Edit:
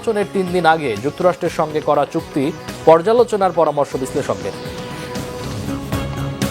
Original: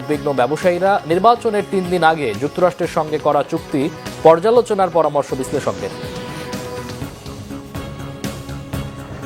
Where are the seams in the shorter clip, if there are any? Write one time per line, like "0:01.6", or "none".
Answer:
0:05.5

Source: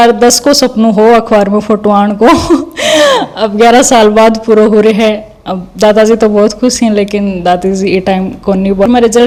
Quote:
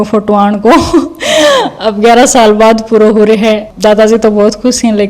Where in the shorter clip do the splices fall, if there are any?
0:03.7

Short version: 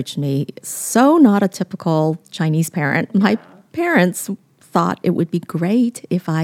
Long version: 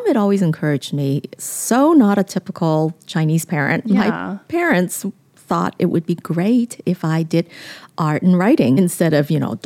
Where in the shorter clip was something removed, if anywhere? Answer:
none

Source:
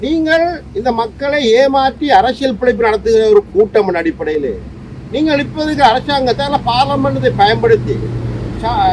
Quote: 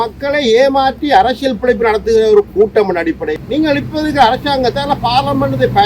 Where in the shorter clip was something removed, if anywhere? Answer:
0:03.3

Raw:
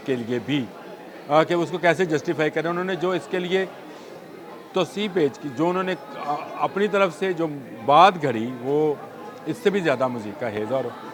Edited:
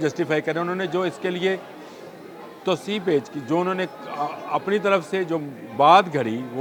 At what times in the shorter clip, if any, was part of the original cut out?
none

